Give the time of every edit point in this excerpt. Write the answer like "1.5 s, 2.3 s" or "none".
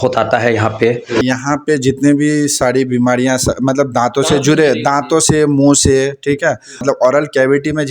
1.2 s, 6.8 s